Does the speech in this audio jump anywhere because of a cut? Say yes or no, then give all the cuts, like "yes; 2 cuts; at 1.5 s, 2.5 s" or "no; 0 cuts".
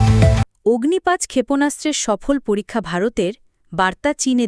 no; 0 cuts